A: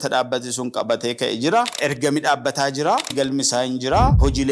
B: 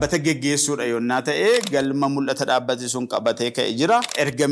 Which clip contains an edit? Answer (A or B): A